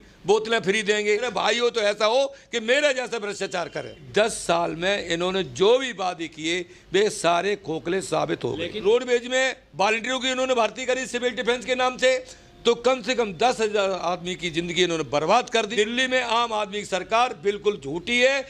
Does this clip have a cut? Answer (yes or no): yes